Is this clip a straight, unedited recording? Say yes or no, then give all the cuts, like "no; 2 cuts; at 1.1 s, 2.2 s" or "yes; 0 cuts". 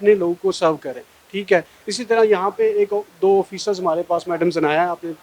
yes; 0 cuts